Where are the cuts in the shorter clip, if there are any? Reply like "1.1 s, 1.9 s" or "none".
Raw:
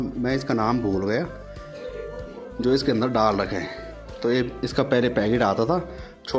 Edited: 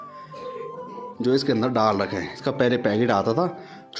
2.4 s

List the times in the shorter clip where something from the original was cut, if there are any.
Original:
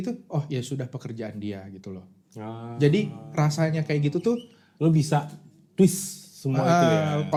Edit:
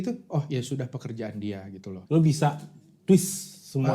1.9 s

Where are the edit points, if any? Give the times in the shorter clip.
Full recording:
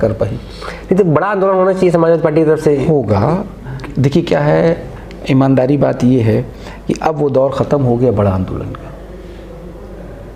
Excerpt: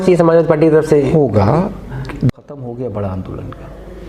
2.3 s

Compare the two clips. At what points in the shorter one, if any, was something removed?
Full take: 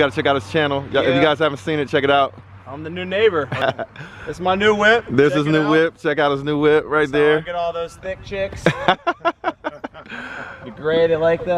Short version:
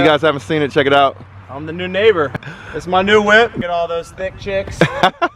2.4 s, 3.6 s

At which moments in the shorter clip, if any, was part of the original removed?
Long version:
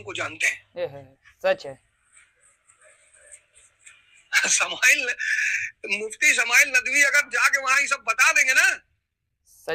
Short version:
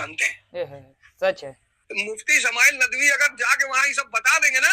1.7 s

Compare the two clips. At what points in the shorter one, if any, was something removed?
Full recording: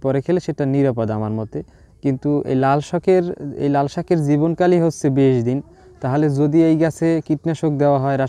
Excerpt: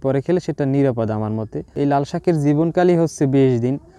1.6 s

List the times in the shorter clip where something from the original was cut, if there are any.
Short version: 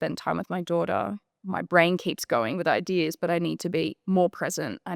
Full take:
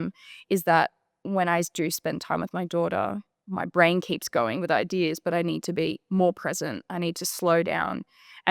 none

